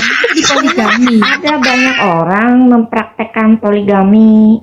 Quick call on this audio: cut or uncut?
uncut